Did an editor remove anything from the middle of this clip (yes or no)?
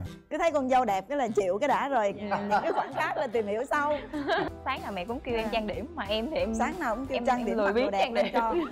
yes